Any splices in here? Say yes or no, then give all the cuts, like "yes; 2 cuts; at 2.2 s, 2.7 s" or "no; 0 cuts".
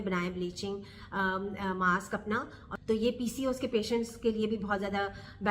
yes; 1 cut; at 2.7 s